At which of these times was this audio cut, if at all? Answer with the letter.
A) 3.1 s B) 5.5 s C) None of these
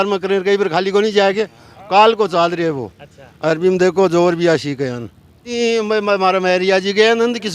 B